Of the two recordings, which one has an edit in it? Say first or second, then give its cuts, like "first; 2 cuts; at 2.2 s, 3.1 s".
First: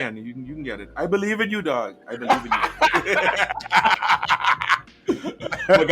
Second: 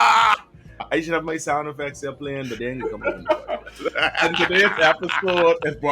first; 1 cut; at 4.9 s